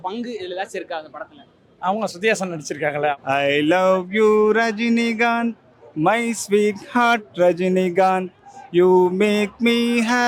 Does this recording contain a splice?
yes; 1 cut; at 3.1 s

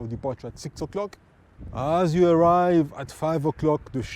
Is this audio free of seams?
no; 1 cut; at 1.6 s

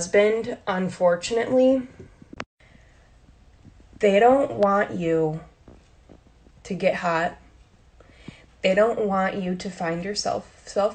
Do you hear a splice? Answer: no; 0 cuts

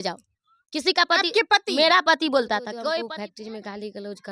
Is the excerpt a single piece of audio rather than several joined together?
no; 1 cut; at 3.0 s

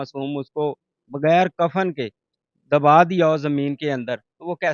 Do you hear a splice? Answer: no; 0 cuts

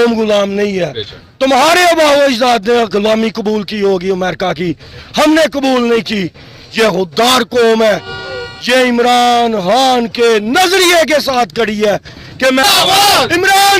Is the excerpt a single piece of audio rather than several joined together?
no; 1 cut; at 12.6 s

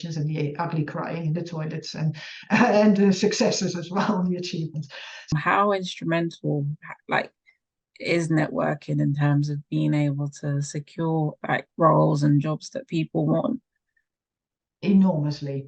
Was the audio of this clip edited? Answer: yes; 1 cut; at 5.3 s

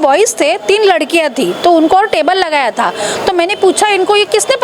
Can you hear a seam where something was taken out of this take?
no; 0 cuts

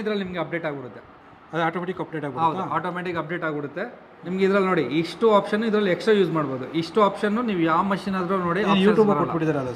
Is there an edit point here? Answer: no; 0 cuts

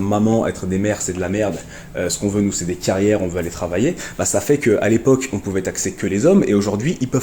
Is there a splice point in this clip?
no; 0 cuts

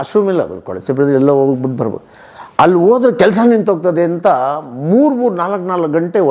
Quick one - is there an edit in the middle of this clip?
no; 0 cuts

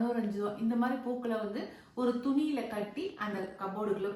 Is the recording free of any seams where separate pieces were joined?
yes; 0 cuts

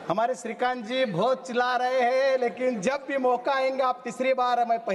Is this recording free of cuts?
yes; 0 cuts

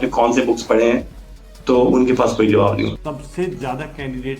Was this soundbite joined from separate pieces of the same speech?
yes; 1 cut; at 3.0 s

